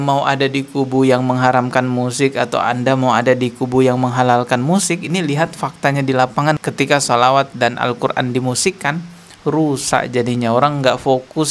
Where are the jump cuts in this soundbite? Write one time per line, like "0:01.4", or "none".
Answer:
none